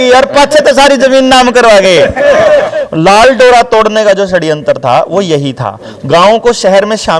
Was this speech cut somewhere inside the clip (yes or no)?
yes